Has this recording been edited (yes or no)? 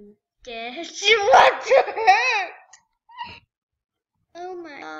no